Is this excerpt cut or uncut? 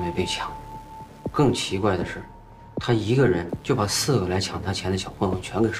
uncut